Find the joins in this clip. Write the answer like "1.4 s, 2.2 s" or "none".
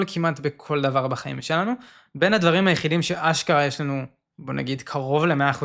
none